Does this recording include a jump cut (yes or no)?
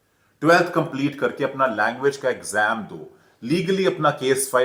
no